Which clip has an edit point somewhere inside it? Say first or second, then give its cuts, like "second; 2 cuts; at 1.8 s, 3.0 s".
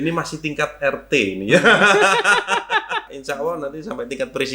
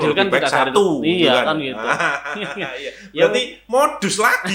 first; 1 cut; at 3.1 s